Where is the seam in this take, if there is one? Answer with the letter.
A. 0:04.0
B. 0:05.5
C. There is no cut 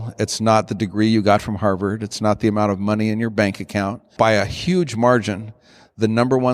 A